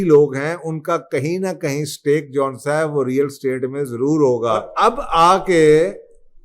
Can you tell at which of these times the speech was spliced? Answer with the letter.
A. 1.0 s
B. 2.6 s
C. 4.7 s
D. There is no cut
C